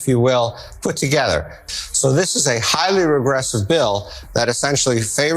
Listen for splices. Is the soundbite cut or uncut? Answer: cut